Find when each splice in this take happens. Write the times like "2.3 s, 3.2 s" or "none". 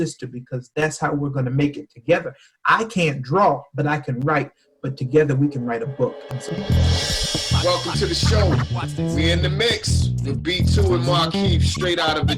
6.4 s